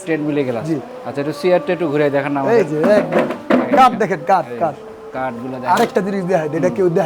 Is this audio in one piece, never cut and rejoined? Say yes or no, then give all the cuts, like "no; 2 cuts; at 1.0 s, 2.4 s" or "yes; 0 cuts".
yes; 0 cuts